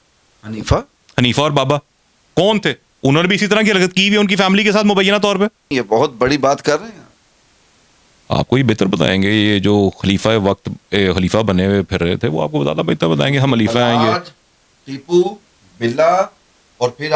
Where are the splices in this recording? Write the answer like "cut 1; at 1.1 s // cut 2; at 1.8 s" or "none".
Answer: cut 1; at 5.7 s